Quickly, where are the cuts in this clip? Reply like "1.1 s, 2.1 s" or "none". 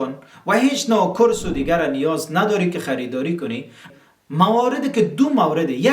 3.8 s